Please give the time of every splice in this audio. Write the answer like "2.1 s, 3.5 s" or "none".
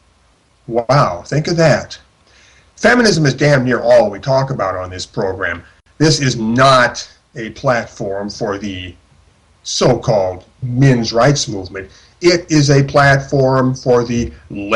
8.5 s